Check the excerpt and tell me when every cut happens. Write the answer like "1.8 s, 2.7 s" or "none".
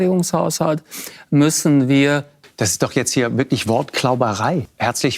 2.3 s